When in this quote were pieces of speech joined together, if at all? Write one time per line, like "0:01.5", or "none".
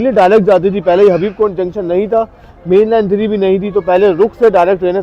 none